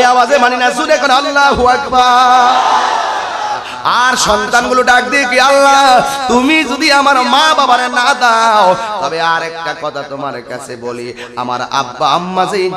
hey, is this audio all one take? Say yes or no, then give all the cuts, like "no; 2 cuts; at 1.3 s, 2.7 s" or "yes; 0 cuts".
no; 1 cut; at 3.7 s